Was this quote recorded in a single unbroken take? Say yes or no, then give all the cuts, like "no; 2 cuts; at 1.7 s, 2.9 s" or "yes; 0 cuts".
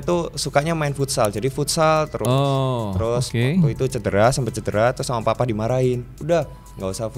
yes; 0 cuts